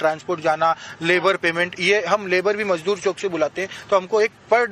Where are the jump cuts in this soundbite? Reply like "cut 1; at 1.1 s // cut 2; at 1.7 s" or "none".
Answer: none